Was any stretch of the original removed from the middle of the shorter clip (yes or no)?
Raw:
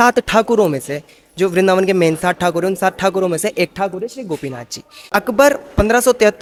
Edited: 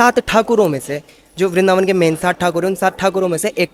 no